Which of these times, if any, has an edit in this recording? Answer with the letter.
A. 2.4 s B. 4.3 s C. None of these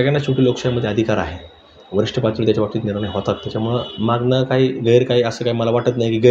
C